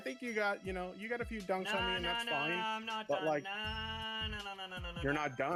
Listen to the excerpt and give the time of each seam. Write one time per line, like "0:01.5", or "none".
none

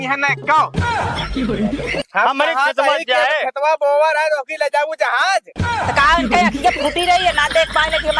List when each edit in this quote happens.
0:02.1

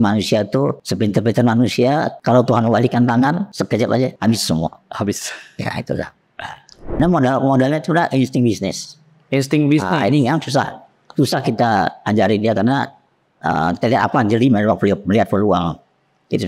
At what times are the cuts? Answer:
0:00.8
0:02.1
0:04.0
0:07.0

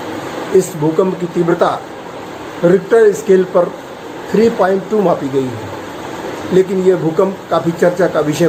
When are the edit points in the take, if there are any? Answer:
none

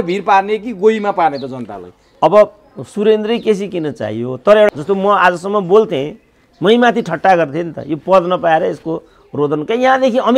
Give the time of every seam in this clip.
0:04.7

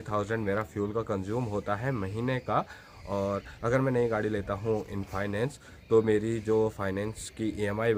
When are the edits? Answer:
none

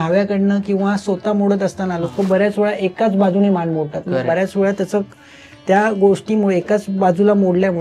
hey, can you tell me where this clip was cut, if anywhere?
none

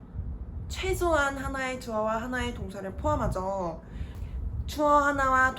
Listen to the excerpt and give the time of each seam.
0:04.2

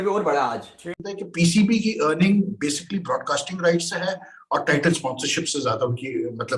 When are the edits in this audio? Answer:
0:01.0

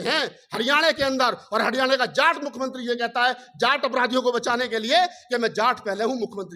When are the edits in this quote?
none

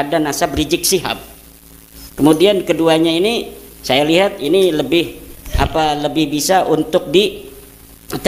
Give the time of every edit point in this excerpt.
none

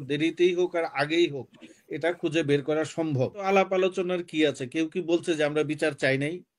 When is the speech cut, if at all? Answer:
0:03.5

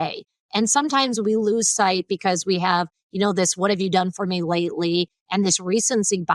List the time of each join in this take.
none

